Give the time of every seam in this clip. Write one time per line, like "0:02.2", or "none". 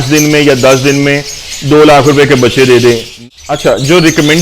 0:03.1